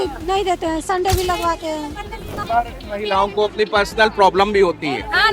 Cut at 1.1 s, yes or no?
no